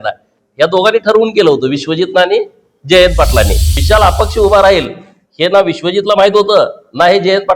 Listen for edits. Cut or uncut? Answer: cut